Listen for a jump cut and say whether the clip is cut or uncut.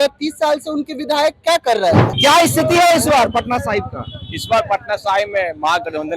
cut